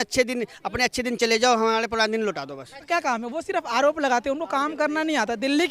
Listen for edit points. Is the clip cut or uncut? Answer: cut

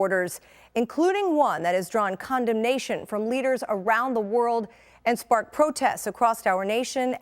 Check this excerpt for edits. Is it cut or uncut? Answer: cut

